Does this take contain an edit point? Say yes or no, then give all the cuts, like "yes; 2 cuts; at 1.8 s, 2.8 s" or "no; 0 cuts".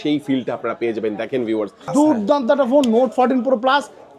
yes; 1 cut; at 1.8 s